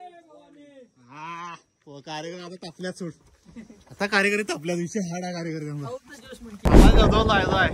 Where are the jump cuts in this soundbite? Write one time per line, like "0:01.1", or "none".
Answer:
0:06.7